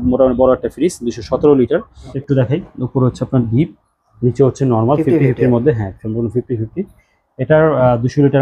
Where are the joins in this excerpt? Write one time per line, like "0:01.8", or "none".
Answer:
0:02.1